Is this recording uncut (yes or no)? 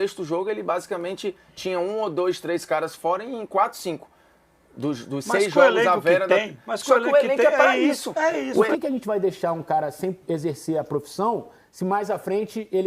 no